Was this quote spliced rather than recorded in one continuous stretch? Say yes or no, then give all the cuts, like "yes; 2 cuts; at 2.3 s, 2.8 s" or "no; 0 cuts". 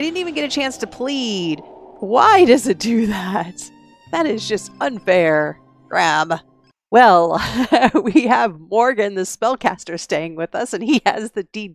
no; 0 cuts